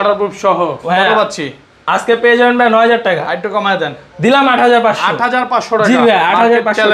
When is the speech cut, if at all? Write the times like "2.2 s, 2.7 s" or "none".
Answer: none